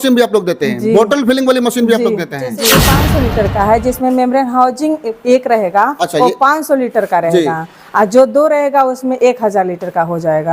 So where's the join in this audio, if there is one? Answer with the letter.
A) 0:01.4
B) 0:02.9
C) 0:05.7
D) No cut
B